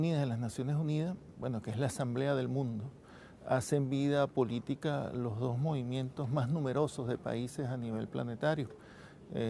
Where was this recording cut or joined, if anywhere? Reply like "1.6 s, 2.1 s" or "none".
none

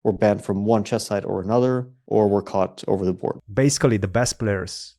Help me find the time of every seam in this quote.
1.9 s, 3.4 s

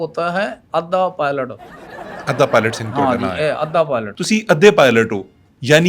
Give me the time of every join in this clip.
4.1 s

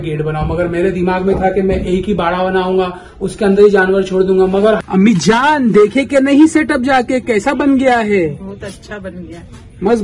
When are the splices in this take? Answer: 4.8 s

